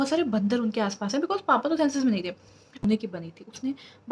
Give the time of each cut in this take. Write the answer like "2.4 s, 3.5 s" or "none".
2.7 s